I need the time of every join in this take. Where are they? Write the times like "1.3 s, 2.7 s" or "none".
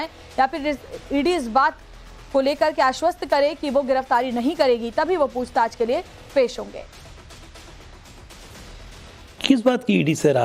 0.9 s